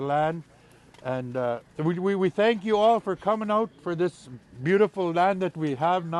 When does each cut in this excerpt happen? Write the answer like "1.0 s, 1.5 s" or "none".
1.7 s